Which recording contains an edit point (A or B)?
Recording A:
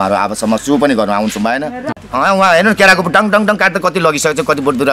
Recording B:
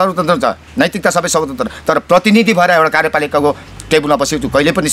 A